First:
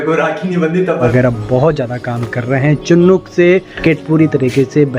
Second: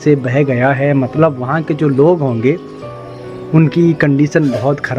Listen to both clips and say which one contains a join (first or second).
first